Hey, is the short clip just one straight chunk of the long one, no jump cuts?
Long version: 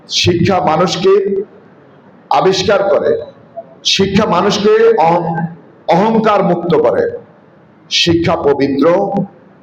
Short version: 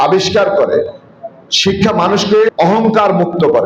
no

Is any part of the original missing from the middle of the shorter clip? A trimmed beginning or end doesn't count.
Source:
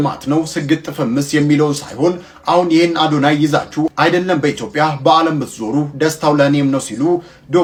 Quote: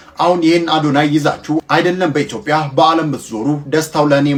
no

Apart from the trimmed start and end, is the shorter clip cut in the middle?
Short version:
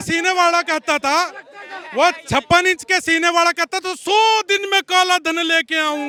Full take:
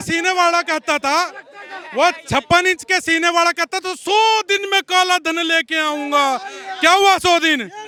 no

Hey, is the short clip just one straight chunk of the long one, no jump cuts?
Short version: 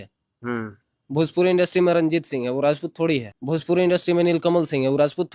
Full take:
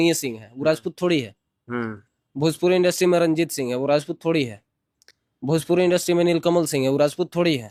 no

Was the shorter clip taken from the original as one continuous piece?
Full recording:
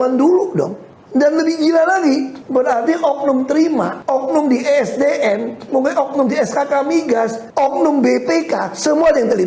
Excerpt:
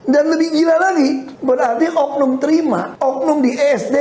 yes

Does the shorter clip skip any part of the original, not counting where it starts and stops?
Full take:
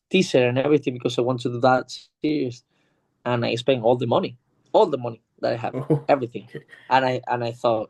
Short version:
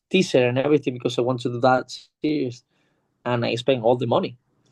no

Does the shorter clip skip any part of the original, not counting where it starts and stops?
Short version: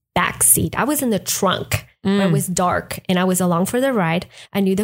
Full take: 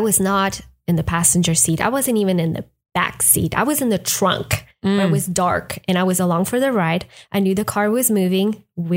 no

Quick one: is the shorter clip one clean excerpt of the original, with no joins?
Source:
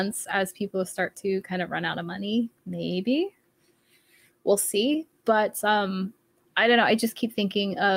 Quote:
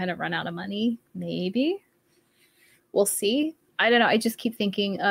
no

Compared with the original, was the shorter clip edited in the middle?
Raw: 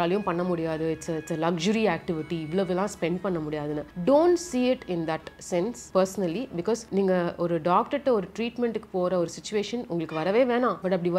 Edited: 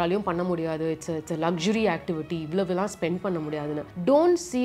no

